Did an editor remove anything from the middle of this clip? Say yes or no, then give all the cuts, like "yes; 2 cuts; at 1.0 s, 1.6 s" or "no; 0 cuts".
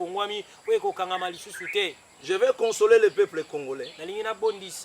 yes; 1 cut; at 2.1 s